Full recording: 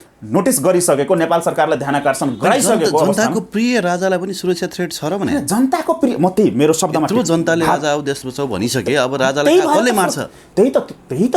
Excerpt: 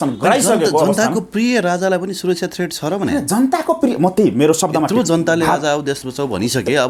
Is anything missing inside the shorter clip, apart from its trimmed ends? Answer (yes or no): no